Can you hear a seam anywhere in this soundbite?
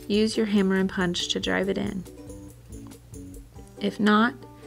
yes; 2 cuts; at 2.0 s, 3.8 s

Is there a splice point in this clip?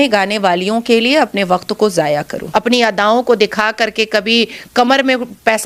yes; 1 cut; at 2.4 s

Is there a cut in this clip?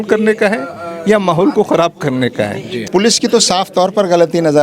yes; 1 cut; at 2.7 s

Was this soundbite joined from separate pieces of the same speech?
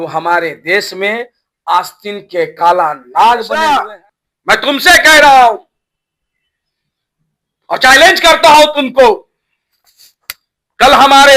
yes; 1 cut; at 3.7 s

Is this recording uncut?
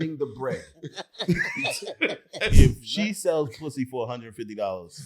no; 1 cut; at 2.5 s

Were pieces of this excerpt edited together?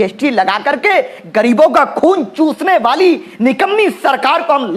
no; 0 cuts

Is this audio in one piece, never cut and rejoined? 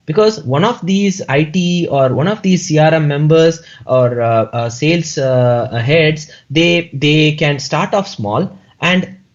yes; 0 cuts

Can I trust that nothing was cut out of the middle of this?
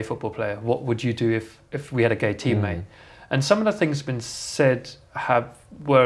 yes; 0 cuts

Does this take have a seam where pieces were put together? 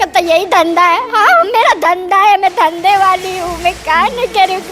no; 0 cuts

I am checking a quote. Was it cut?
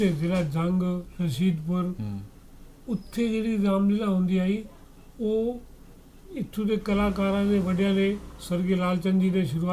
no; 0 cuts

